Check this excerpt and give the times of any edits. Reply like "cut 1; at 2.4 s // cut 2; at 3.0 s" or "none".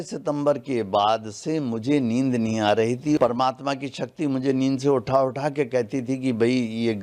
cut 1; at 3.2 s